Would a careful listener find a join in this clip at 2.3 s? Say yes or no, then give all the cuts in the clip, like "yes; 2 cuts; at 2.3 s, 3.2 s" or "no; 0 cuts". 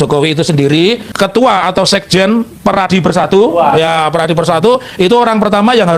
no; 1 cut; at 1.1 s